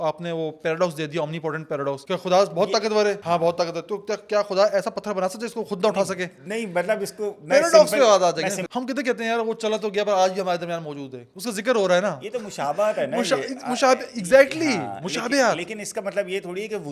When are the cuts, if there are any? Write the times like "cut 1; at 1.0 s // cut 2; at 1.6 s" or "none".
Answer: cut 1; at 2.0 s // cut 2; at 3.2 s // cut 3; at 8.6 s

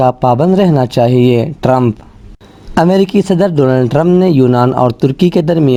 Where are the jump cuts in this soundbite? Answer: none

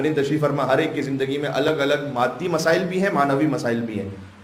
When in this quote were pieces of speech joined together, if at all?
none

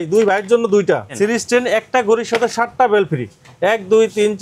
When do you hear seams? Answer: cut 1; at 1.1 s

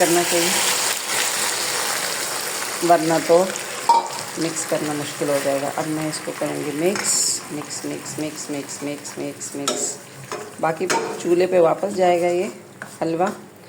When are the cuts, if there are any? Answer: none

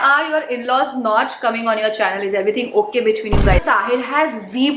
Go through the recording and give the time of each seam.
cut 1; at 3.6 s

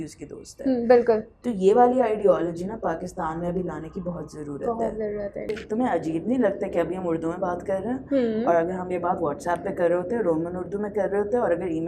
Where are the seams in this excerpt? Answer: cut 1; at 5.5 s

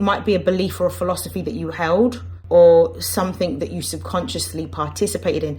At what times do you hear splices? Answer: cut 1; at 2.3 s

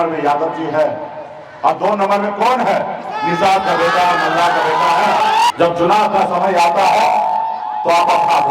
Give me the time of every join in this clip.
cut 1; at 5.5 s

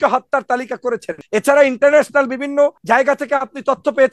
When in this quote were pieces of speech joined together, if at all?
cut 1; at 1.1 s // cut 2; at 2.8 s

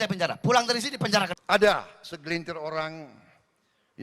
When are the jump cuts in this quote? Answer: cut 1; at 1.4 s

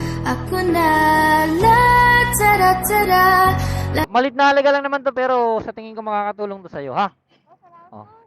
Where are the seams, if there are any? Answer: cut 1; at 4.1 s

